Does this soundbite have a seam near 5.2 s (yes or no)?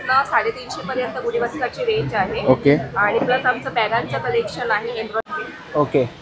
yes